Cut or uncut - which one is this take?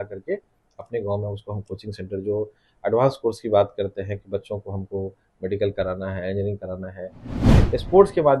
cut